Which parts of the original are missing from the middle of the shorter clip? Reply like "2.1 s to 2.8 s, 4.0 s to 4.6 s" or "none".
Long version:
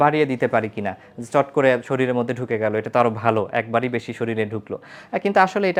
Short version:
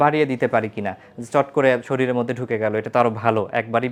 none